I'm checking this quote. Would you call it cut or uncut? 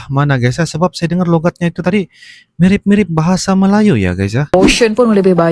cut